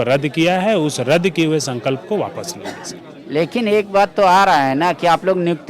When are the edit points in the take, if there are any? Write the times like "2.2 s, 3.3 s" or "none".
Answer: none